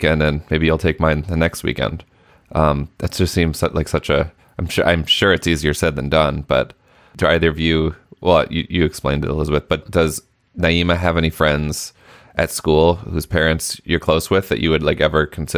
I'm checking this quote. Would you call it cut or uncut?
cut